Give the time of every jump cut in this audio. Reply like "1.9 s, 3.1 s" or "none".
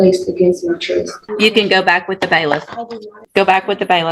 1.2 s, 3.2 s